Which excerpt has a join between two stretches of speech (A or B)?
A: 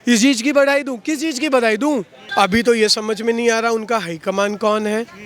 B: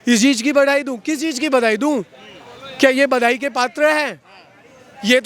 A